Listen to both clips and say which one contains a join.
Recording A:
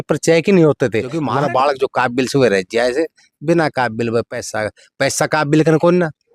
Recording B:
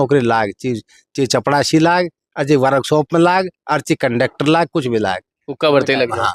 A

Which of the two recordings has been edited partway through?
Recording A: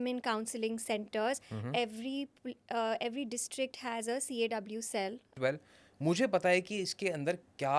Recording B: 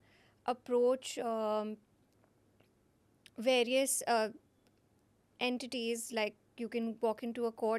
A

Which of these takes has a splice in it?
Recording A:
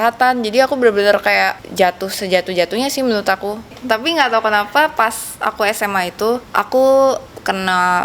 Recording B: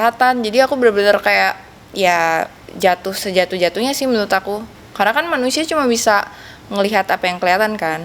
A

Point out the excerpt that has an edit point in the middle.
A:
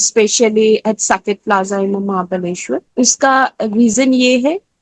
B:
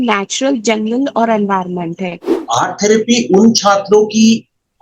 B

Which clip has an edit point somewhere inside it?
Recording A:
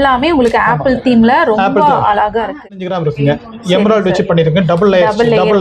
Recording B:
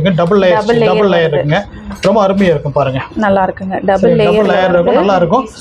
A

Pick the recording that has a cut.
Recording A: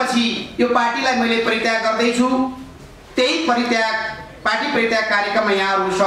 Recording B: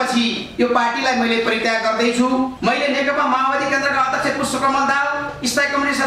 B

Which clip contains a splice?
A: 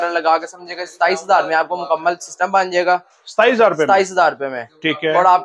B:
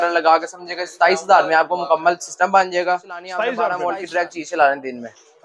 B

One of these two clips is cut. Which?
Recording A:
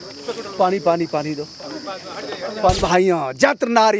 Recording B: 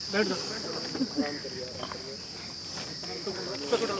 A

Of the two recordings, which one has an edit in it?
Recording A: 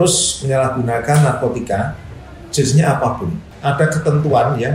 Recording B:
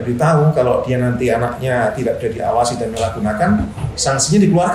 A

